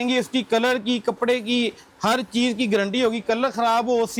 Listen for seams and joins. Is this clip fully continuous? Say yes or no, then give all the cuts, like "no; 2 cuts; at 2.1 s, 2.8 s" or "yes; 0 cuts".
yes; 0 cuts